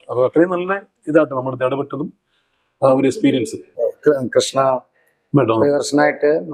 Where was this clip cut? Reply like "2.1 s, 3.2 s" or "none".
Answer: 3.6 s